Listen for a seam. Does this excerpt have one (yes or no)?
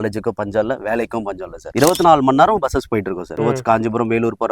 yes